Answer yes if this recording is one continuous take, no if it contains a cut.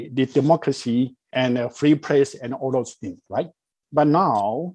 yes